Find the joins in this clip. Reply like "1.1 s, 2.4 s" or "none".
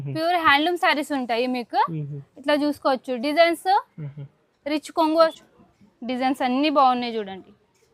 5.4 s